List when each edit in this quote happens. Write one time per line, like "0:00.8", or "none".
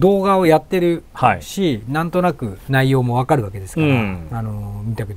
0:02.5